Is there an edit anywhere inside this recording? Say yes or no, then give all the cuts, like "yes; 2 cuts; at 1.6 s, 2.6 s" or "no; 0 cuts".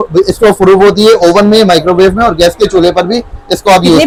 no; 0 cuts